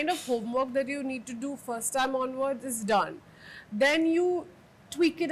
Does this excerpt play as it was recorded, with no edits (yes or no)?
yes